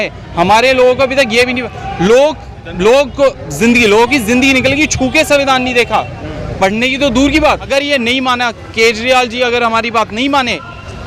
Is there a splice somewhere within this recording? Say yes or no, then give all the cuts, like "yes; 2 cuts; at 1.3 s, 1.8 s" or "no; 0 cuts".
yes; 1 cut; at 7.7 s